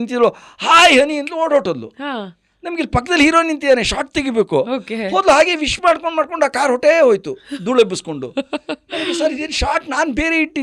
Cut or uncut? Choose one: uncut